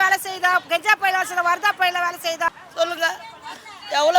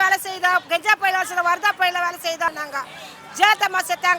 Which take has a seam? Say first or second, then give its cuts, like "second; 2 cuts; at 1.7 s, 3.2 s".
first; 1 cut; at 2.6 s